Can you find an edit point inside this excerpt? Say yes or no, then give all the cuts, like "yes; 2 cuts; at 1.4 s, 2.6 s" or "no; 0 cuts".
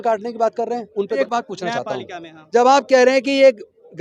yes; 1 cut; at 1.2 s